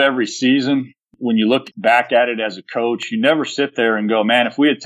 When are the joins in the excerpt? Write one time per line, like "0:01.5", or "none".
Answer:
0:01.0
0:01.7

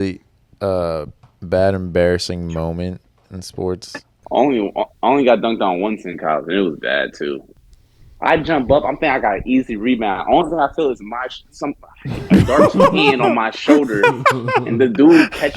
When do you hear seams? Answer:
0:04.2
0:07.5

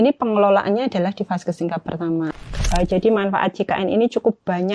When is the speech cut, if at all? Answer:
0:02.5

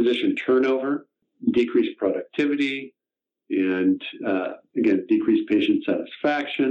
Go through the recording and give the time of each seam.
0:01.3

